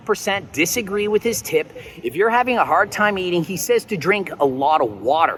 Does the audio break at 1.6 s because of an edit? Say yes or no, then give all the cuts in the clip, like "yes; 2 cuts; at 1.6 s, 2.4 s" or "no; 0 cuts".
no; 0 cuts